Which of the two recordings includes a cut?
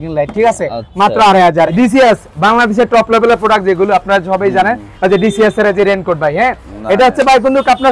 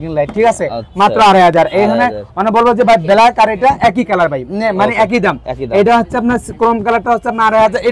first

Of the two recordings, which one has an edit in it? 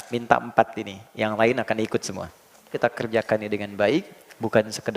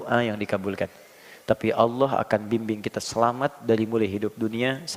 first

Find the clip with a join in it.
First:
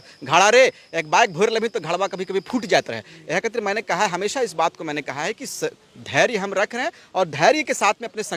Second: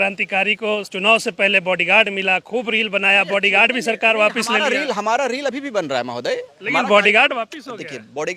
second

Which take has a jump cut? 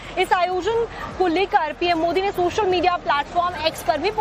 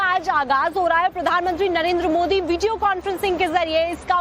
second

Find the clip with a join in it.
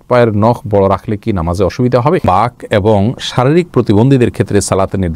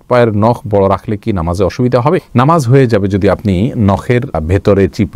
first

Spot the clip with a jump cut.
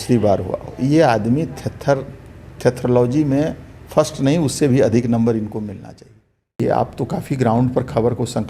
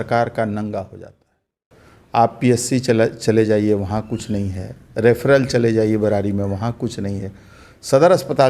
first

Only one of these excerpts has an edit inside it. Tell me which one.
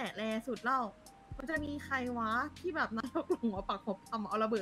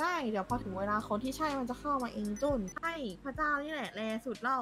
second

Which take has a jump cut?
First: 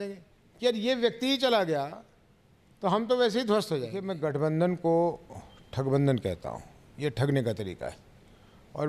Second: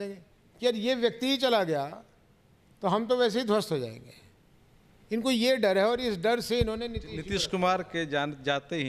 first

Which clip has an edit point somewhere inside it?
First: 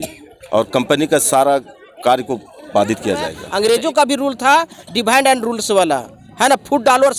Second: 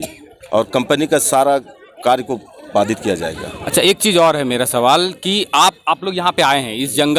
first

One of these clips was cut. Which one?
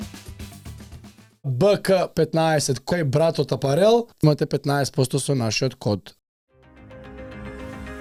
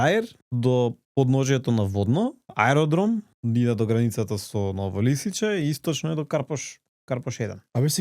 second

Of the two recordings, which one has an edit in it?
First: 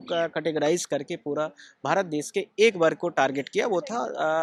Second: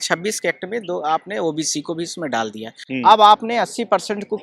second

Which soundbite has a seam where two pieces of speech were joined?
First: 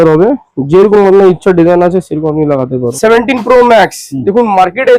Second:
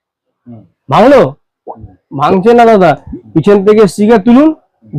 first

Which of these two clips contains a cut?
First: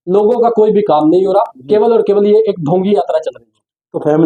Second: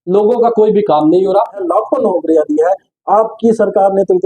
second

